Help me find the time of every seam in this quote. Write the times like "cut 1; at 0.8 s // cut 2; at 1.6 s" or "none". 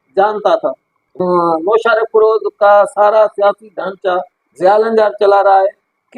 cut 1; at 1.1 s